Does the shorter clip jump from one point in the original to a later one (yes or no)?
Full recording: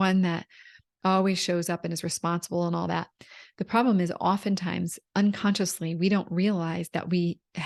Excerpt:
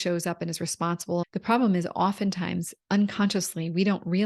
yes